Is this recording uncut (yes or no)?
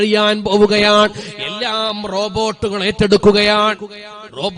yes